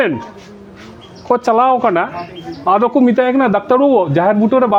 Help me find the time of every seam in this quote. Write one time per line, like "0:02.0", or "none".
none